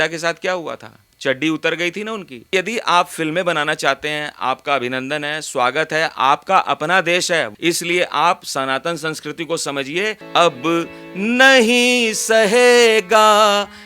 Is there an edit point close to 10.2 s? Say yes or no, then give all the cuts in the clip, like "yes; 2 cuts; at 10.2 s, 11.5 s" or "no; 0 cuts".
yes; 2 cuts; at 2.4 s, 10.2 s